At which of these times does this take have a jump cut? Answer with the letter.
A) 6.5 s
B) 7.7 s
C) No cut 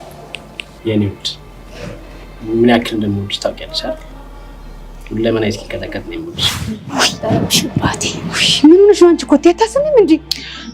A